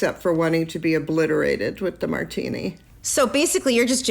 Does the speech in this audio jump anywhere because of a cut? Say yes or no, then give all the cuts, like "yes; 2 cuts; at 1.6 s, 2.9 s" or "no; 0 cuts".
yes; 1 cut; at 2.8 s